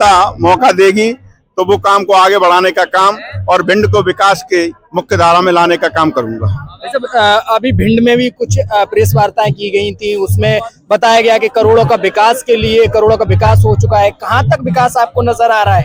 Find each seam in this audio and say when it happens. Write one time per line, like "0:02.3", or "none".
none

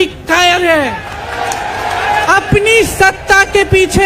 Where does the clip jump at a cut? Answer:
0:02.3

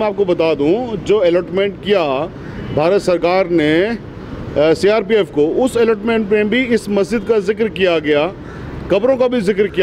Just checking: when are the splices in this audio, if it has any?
none

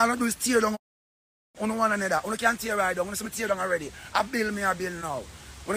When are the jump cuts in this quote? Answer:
none

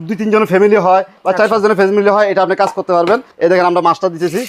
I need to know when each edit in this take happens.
0:03.3

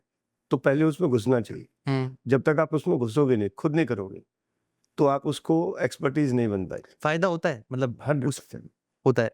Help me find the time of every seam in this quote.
none

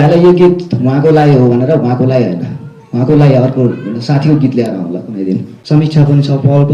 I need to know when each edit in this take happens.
0:05.5

